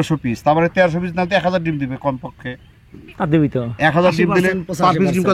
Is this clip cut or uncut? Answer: uncut